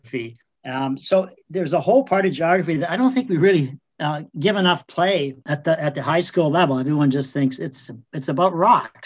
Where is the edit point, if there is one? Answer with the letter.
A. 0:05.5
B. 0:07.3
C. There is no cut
A